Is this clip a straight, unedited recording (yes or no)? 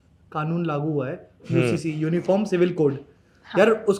yes